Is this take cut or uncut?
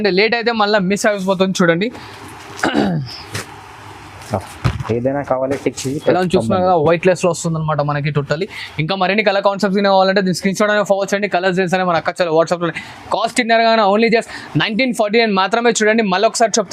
uncut